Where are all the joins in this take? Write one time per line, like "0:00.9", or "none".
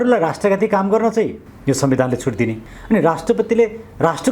0:01.5
0:02.7